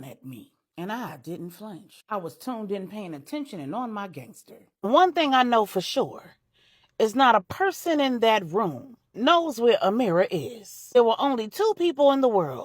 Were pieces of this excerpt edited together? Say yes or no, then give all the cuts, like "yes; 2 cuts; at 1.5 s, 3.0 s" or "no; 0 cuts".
yes; 1 cut; at 11.0 s